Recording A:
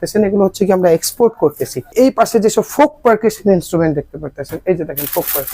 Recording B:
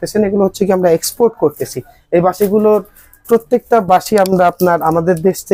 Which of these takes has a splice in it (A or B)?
A